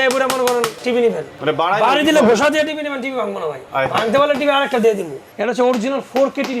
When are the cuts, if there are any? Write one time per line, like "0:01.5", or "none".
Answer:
0:01.1
0:03.6
0:05.2